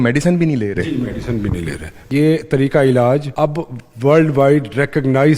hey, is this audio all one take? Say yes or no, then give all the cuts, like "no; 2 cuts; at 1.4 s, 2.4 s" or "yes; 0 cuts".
no; 2 cuts; at 2.1 s, 3.3 s